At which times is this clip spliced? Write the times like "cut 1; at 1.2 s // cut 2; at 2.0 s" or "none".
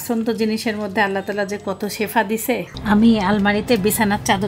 cut 1; at 2.7 s